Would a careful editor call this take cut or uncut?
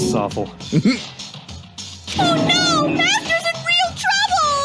uncut